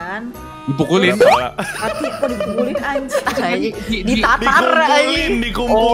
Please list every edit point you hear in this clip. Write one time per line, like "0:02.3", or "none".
none

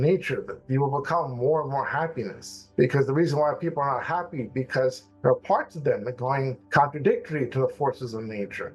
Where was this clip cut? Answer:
none

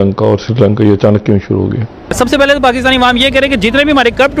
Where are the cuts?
0:02.1

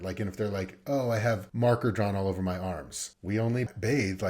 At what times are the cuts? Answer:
0:01.5
0:03.6

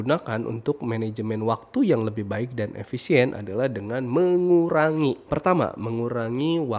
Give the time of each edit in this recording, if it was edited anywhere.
0:05.2

